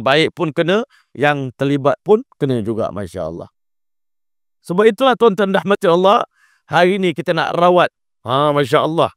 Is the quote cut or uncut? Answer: uncut